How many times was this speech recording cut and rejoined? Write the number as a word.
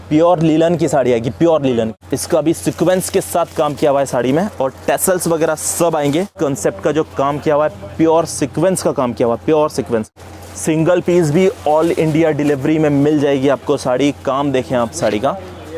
three